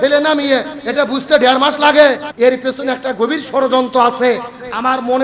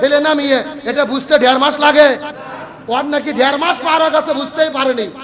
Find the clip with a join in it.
first; 1 cut; at 2.3 s

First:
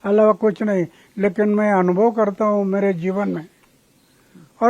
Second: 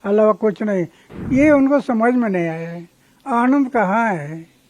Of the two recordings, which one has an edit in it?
second; 1 cut; at 1.0 s

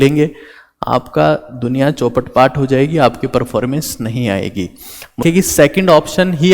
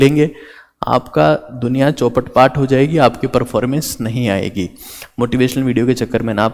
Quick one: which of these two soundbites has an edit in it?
first; 1 cut; at 5.2 s

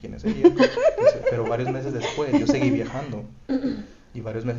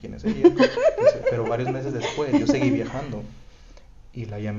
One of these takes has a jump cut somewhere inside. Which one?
second; 1 cut; at 3.3 s

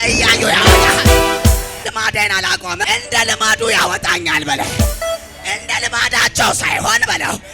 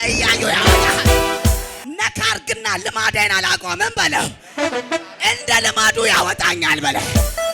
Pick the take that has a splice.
first; 2 cuts; at 1.8 s, 2.9 s

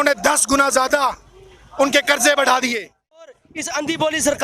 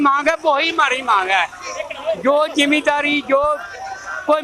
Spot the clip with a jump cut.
first; 1 cut; at 3.4 s

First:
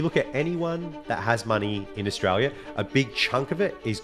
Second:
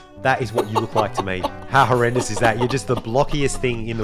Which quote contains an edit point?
second; 1 cut; at 1.6 s

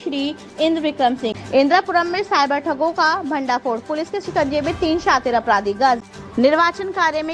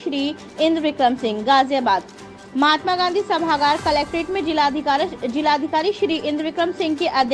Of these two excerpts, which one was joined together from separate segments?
first; 2 cuts; at 1.4 s, 6.0 s

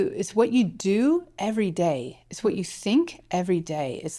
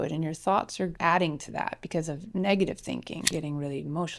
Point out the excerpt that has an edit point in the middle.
second; 2 cuts; at 0.9 s, 3.3 s

